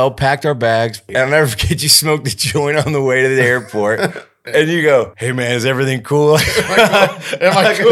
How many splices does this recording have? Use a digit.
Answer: 3